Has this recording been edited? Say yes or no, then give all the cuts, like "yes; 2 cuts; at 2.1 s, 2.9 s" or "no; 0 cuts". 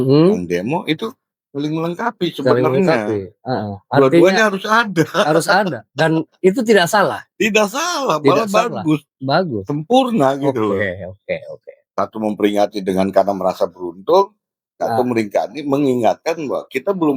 no; 0 cuts